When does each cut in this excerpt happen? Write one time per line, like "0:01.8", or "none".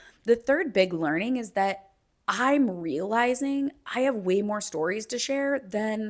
none